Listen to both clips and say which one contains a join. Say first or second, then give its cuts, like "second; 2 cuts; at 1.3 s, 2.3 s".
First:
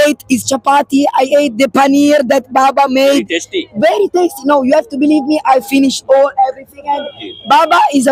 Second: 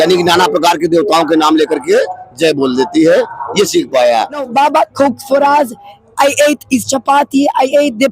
second; 1 cut; at 4.5 s